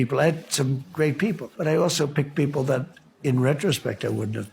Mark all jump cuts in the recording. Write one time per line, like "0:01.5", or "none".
0:01.5

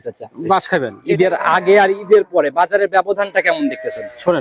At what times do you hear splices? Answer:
0:01.0

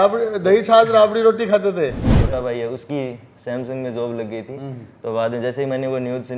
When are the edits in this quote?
0:02.2

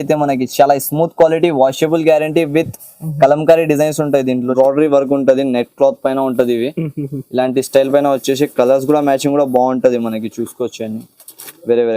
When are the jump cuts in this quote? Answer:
0:04.5

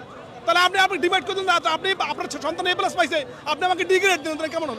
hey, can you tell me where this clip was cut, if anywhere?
none

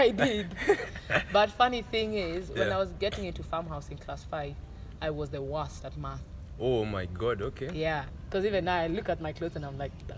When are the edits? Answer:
0:08.2

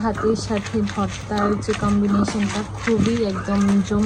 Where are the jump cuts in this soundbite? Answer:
none

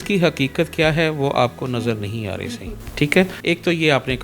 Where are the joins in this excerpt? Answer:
none

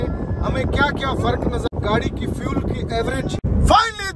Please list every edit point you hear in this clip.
0:01.7
0:03.4

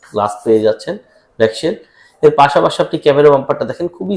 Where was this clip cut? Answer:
none

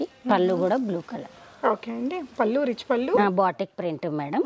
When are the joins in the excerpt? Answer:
0:03.2

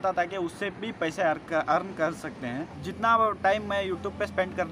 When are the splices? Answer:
none

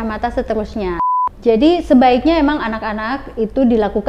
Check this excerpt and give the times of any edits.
0:01.1

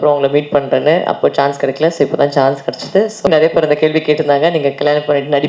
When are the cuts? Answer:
0:03.3

